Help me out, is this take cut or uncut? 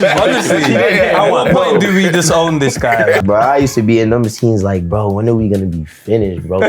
cut